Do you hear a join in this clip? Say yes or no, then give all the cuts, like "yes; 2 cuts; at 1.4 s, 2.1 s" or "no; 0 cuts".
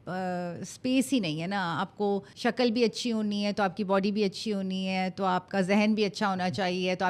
yes; 1 cut; at 2.3 s